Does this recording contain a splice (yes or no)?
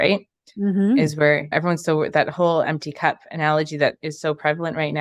no